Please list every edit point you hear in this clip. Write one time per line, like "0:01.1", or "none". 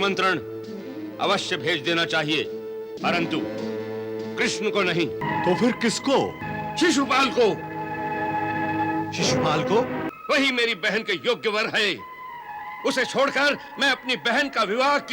0:02.9
0:05.2
0:06.5
0:10.1